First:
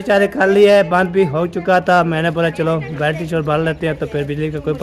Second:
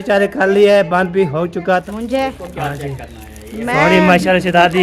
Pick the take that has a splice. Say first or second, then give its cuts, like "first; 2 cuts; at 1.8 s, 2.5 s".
second; 1 cut; at 1.8 s